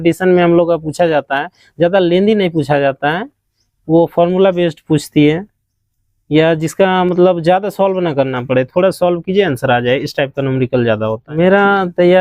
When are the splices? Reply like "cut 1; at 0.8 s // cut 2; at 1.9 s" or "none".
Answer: cut 1; at 11.2 s